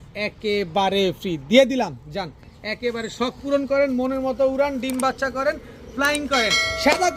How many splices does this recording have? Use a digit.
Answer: 0